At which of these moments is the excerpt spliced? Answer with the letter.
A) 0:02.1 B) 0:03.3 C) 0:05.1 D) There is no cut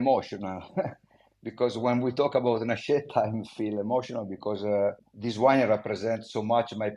C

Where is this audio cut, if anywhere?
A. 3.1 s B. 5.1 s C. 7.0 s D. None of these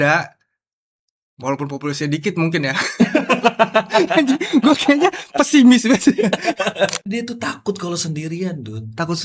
C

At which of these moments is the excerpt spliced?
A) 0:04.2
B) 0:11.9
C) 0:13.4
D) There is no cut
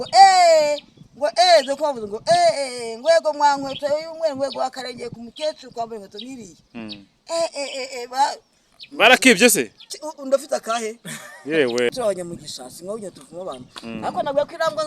B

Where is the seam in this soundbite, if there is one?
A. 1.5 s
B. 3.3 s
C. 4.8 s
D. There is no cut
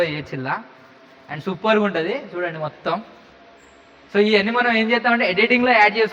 D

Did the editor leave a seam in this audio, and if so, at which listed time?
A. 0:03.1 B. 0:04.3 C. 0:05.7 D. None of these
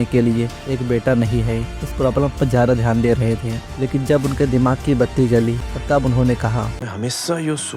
C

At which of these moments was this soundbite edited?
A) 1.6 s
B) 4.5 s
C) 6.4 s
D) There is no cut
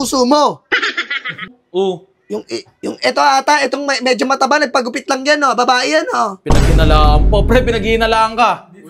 A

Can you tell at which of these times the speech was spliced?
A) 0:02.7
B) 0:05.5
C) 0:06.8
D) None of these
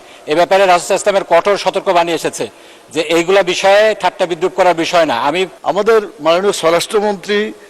B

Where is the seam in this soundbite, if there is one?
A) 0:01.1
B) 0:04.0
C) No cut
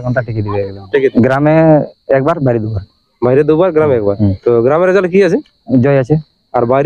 A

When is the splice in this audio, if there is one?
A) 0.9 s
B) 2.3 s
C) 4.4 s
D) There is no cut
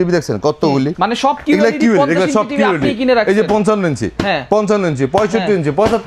A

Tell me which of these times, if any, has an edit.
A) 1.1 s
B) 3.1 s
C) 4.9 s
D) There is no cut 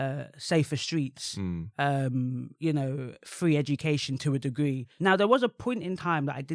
C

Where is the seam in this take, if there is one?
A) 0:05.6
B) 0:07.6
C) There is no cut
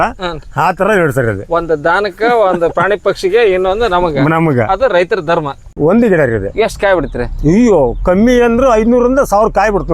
A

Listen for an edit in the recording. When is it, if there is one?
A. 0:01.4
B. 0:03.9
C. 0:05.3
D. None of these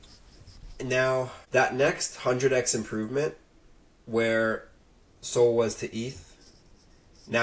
A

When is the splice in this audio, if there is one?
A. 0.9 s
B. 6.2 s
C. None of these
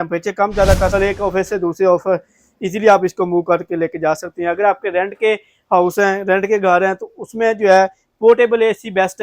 A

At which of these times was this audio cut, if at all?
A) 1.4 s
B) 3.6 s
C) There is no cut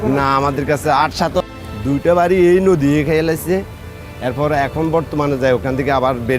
A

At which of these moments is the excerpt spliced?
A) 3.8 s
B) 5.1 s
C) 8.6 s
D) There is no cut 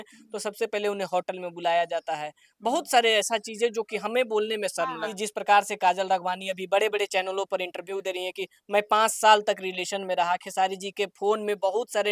B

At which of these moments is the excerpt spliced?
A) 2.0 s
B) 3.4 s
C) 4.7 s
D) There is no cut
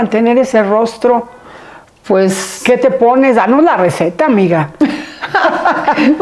D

